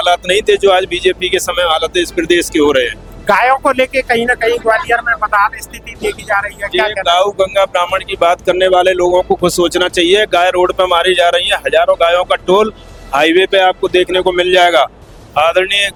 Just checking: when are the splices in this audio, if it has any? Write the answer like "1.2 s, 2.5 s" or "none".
none